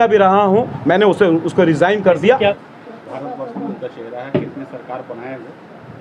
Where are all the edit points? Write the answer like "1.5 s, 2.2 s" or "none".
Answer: 2.5 s